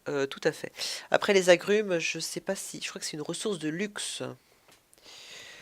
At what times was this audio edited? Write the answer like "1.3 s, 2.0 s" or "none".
2.7 s